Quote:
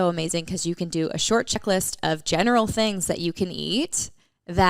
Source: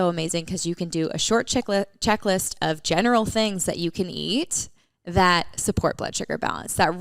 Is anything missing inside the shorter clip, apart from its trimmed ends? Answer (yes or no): yes